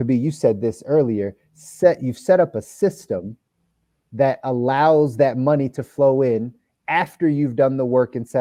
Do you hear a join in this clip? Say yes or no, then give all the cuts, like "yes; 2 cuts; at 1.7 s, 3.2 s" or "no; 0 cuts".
no; 0 cuts